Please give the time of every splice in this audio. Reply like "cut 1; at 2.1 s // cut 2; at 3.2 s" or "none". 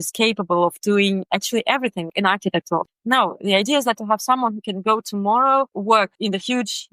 cut 1; at 2.9 s